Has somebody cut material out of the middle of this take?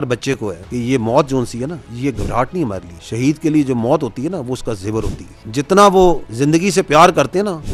no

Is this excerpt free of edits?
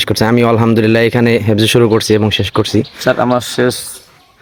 yes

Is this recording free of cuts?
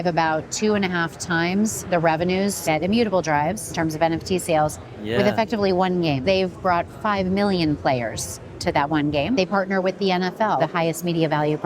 no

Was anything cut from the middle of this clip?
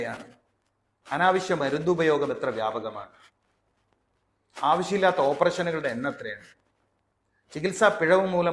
no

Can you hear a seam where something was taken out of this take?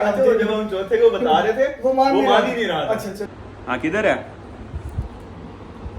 yes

